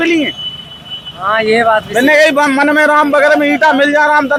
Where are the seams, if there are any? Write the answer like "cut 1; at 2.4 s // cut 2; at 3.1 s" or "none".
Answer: none